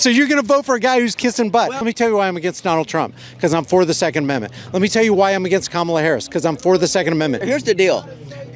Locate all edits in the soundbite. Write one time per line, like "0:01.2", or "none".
0:01.8
0:07.4